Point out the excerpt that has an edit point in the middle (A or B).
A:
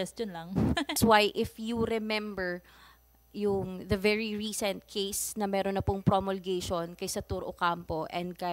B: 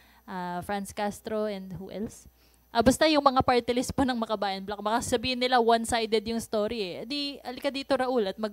A